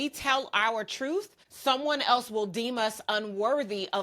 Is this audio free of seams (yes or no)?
no